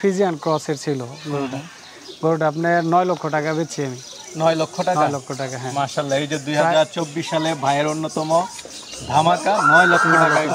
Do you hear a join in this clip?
no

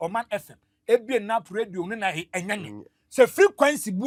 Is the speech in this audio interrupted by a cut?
no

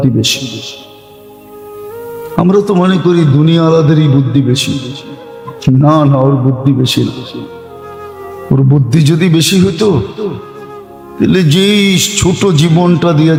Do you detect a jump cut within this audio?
no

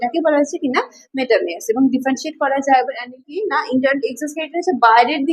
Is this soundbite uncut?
no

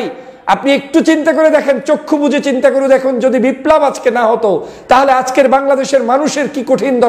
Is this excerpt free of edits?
yes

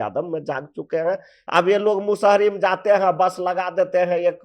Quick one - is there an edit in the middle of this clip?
yes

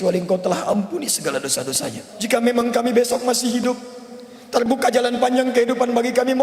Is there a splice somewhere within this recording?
yes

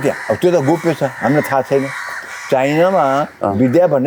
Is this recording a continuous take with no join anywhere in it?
yes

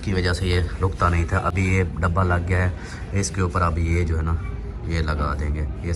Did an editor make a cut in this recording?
no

